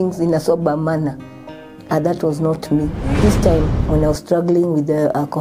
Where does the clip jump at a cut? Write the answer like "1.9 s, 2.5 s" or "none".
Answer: 3.2 s

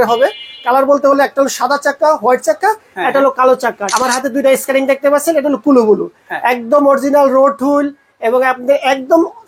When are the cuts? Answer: 3.8 s

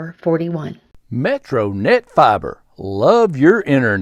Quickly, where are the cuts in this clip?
0.9 s

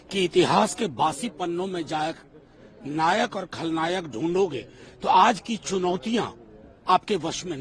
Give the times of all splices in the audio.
none

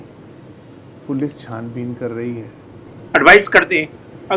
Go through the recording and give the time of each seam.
2.9 s

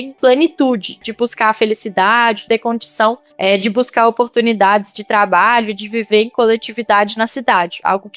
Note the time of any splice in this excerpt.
1.0 s, 2.4 s

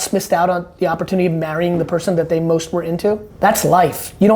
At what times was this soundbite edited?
3.3 s

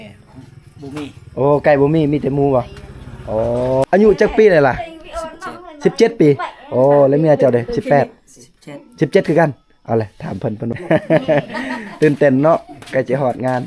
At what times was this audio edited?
3.8 s, 10.7 s

